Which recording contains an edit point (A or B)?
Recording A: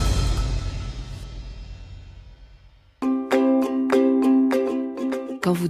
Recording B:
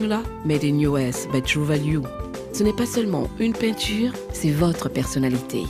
A